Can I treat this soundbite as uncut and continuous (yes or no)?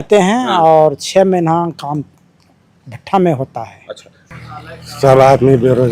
no